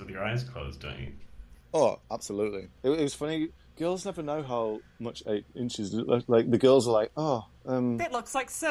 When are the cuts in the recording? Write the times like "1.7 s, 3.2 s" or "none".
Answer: 2.8 s